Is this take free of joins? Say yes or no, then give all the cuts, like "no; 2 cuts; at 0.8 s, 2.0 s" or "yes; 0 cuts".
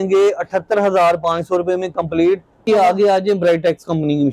no; 1 cut; at 2.7 s